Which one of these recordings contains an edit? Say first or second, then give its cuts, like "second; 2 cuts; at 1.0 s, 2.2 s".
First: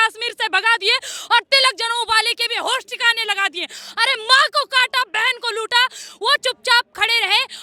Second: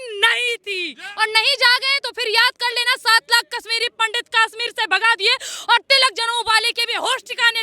second; 1 cut; at 1.0 s